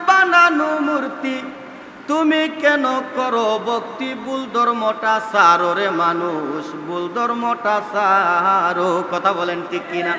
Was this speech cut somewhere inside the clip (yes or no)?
no